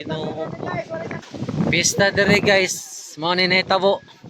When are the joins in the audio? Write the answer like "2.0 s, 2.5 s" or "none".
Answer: 1.2 s